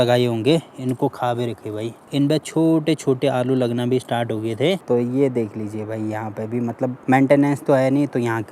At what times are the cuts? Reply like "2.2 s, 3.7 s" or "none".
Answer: 2.0 s, 4.8 s, 7.0 s